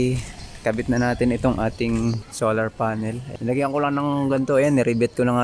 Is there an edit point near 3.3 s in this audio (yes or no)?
yes